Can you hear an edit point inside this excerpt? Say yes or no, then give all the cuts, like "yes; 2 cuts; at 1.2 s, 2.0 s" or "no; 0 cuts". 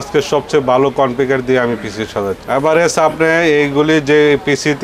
yes; 1 cut; at 2.4 s